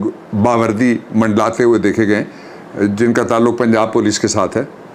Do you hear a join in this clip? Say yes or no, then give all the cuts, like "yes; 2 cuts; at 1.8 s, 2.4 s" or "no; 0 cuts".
no; 0 cuts